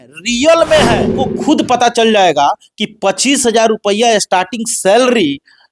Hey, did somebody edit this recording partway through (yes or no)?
yes